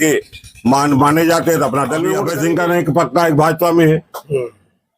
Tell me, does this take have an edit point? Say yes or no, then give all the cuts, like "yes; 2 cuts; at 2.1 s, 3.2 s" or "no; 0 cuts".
yes; 1 cut; at 2.2 s